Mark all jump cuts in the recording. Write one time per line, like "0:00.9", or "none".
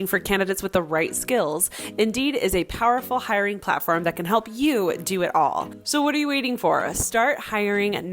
0:05.8